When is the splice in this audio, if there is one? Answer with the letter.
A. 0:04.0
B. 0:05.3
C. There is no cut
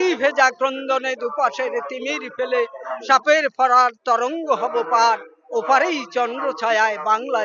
C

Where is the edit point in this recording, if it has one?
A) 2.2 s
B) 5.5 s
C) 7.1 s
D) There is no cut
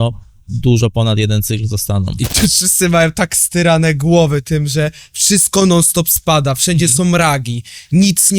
A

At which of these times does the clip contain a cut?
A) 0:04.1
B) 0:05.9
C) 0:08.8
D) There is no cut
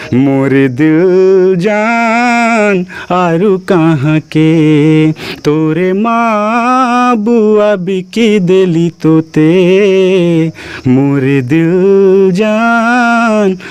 D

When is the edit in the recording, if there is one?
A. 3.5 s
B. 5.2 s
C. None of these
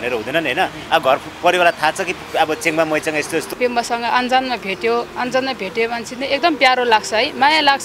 A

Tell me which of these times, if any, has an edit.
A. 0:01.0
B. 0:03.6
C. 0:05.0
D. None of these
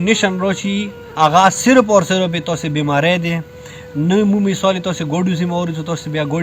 A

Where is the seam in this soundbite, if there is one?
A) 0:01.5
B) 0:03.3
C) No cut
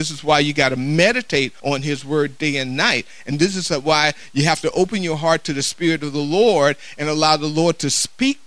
A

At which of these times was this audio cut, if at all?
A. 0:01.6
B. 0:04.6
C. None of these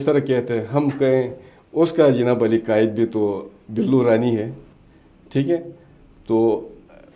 B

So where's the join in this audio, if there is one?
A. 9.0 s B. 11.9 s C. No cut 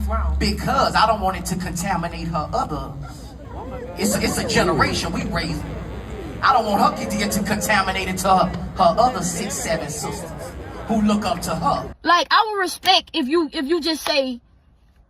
B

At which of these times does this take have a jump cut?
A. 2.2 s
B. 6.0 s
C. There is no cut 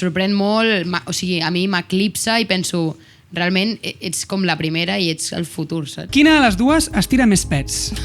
B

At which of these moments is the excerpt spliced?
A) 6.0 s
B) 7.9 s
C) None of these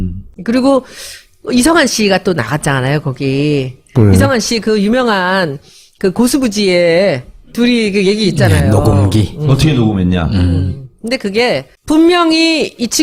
C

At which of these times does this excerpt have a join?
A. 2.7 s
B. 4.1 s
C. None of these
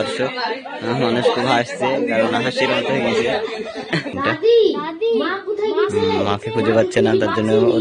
B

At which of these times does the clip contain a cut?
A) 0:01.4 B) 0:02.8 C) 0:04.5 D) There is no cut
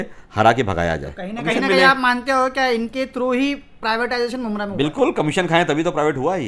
A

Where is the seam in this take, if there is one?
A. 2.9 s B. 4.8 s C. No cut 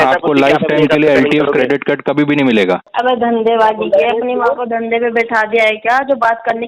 A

